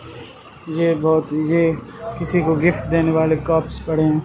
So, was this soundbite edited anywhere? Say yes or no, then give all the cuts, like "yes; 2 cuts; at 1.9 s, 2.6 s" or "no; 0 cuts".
no; 0 cuts